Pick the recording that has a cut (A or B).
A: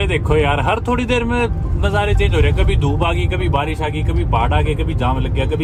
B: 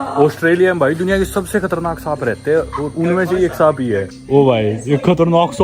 B